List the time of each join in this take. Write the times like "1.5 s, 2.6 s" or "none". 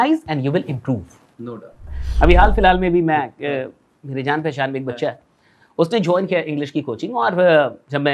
2.0 s